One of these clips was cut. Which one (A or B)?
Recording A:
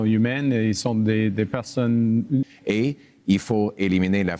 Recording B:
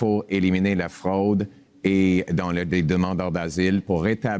A